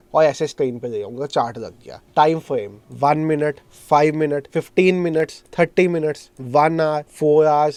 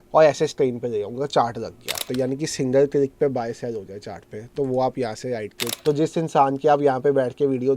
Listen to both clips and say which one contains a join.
second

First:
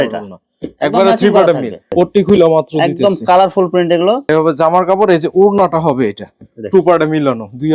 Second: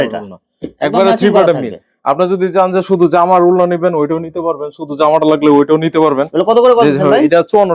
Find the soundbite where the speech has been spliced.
first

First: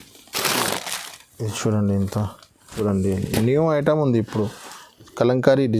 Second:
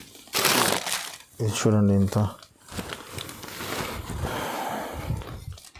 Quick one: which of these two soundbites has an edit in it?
first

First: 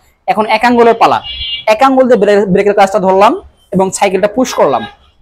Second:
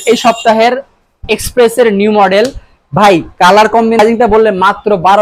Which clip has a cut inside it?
second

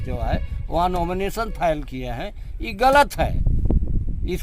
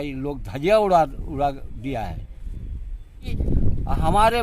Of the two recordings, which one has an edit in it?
second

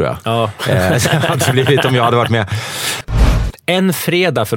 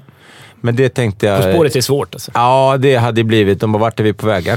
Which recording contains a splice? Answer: first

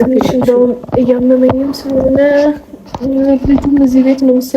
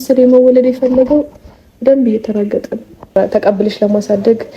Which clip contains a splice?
second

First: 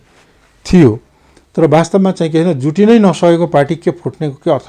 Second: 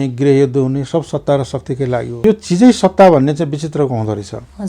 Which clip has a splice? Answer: second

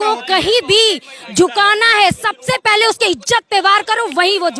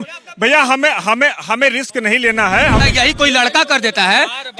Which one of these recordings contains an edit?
second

